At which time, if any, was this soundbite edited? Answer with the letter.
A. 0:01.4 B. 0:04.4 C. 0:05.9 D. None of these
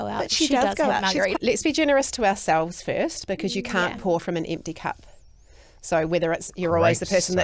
A